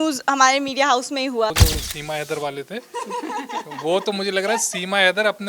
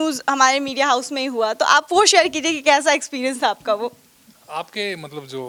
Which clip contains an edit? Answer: first; 1 cut; at 1.5 s

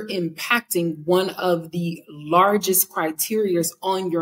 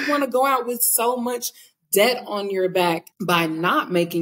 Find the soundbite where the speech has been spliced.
second; 1 cut; at 3.1 s

